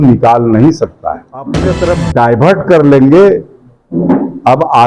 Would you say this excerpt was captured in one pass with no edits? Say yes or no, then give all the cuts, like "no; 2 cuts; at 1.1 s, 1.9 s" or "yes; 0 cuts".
no; 1 cut; at 1.7 s